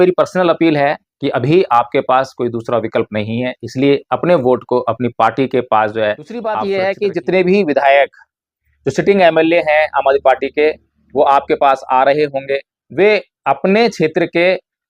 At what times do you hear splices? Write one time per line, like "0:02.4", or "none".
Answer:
0:06.6